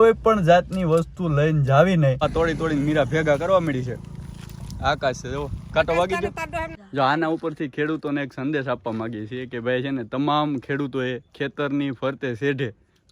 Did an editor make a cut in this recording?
yes; 2 cuts; at 2.2 s, 6.7 s

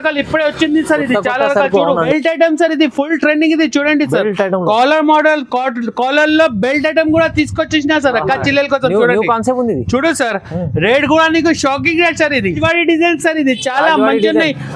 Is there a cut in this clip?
yes; 2 cuts; at 2.0 s, 12.6 s

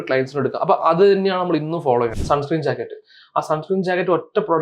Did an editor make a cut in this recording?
yes; 1 cut; at 2.2 s

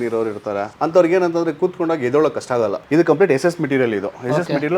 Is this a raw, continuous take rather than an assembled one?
no; 1 cut; at 2.8 s

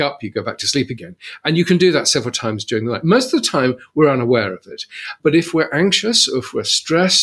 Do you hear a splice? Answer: yes; 1 cut; at 1.0 s

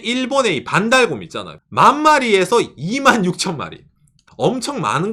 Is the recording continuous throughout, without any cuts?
yes; 0 cuts

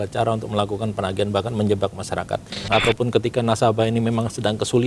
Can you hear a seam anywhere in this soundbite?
yes; 1 cut; at 2.6 s

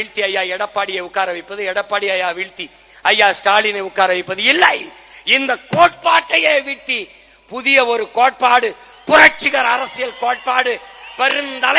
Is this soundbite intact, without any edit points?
yes; 0 cuts

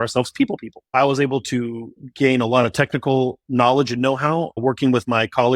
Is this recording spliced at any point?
yes; 3 cuts; at 0.9 s, 2.0 s, 4.6 s

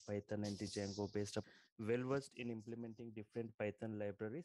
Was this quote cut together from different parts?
yes; 1 cut; at 1.5 s

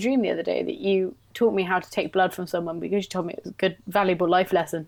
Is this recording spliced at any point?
no; 0 cuts

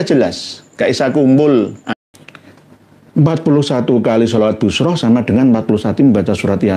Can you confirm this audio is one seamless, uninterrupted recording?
no; 1 cut; at 1.8 s

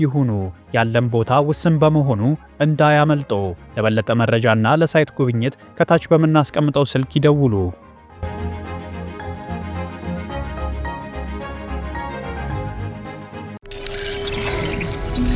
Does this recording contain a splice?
yes; 1 cut; at 13.7 s

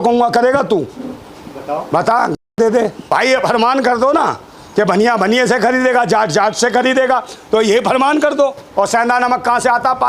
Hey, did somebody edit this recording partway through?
yes; 2 cuts; at 2.9 s, 8.6 s

